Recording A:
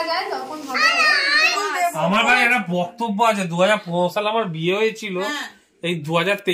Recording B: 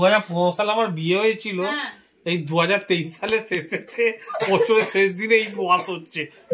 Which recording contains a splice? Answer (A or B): A